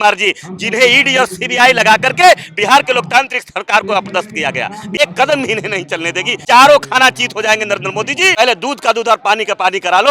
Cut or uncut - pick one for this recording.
cut